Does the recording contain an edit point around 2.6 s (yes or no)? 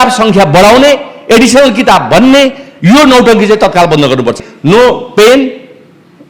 no